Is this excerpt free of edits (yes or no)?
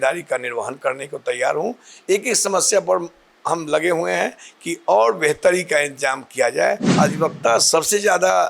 no